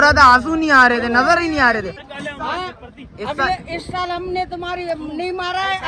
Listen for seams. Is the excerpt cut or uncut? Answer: cut